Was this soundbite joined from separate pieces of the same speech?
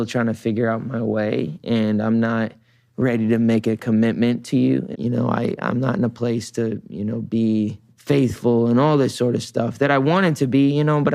yes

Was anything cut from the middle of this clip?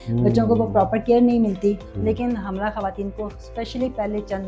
yes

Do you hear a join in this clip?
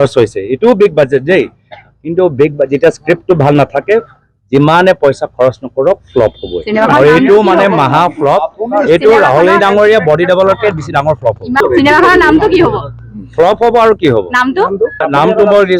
yes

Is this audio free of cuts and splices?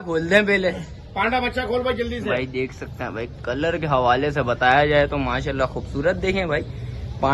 yes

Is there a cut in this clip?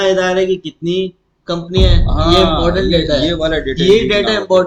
no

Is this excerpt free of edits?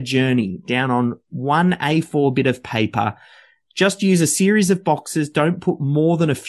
yes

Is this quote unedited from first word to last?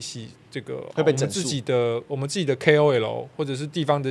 yes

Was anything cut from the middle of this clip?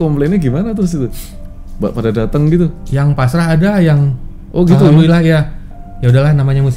no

